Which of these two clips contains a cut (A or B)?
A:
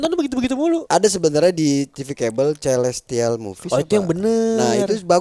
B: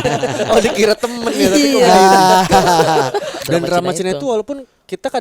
B